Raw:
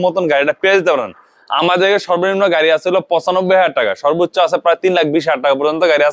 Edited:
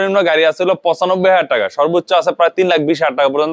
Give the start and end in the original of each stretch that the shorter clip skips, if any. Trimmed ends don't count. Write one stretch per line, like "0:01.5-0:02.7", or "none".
none